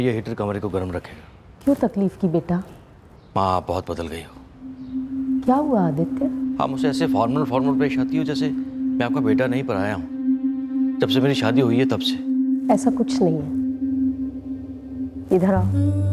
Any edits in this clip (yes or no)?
no